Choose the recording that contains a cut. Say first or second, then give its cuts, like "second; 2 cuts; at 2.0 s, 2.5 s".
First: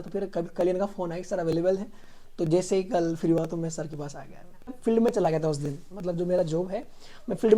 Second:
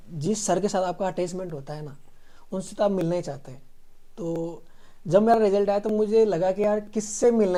first; 1 cut; at 4.7 s